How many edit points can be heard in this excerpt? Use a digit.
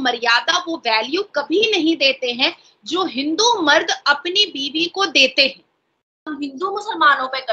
1